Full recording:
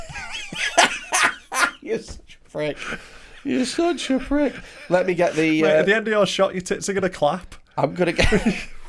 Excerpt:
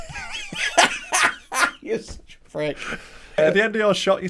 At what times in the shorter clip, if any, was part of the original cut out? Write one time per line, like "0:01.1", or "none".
0:03.4